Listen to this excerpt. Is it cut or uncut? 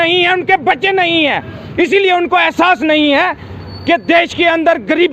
uncut